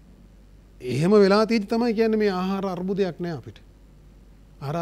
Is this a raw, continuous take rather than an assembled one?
yes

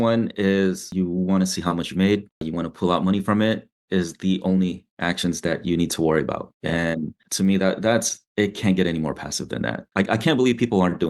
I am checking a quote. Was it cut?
yes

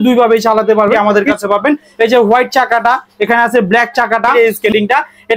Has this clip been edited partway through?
yes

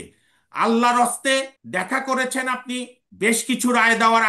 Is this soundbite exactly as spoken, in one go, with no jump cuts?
no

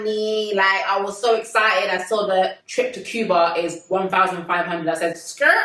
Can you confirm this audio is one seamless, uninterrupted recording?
yes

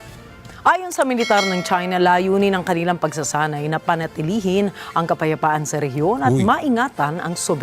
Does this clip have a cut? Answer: yes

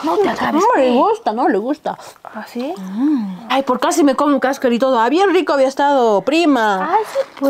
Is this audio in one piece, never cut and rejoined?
yes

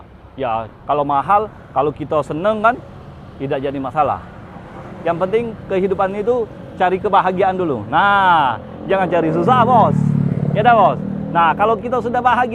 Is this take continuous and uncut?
yes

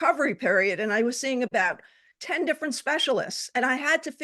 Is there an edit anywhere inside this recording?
yes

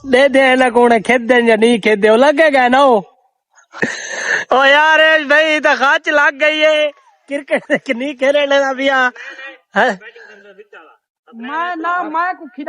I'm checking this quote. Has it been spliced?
yes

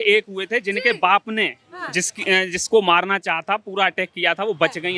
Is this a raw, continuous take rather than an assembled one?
yes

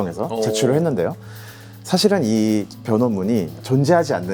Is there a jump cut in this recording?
no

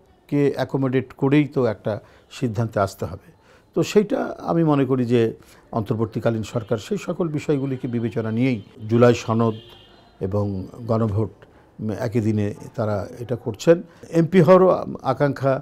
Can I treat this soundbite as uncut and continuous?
no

